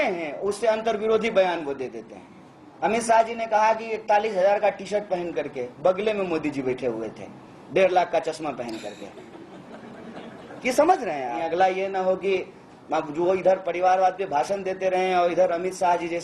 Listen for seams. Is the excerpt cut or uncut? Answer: cut